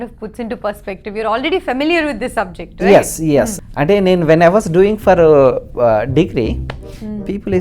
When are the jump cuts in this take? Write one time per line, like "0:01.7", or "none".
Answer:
0:03.6